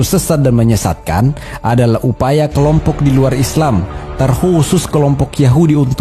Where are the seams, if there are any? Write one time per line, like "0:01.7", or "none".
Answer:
none

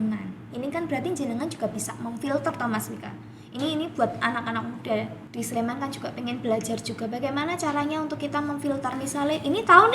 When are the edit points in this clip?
0:05.2
0:08.9

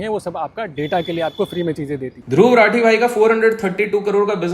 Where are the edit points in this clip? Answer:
0:02.1

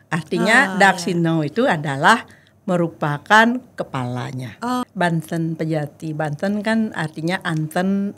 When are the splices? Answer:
0:04.8

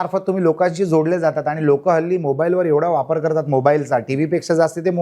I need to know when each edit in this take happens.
none

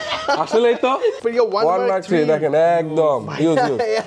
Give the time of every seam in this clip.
0:01.2

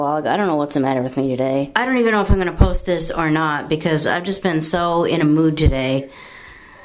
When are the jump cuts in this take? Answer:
0:01.7

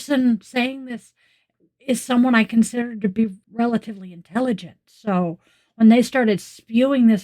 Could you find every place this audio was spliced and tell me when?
0:03.4

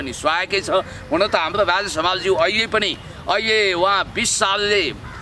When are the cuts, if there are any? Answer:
none

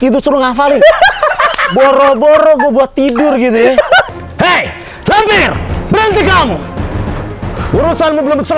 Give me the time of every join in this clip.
0:04.1

